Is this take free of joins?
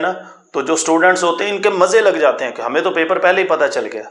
yes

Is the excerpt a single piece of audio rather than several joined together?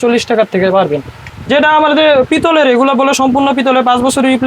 no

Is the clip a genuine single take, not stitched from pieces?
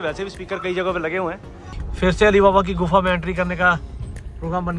no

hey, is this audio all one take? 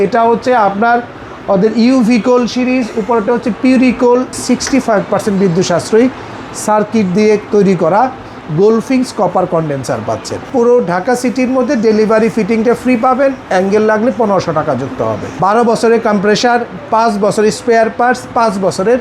no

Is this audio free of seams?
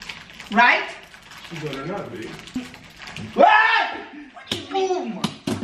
no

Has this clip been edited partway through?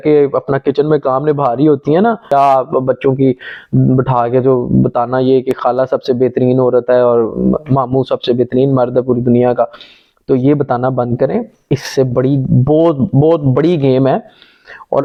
no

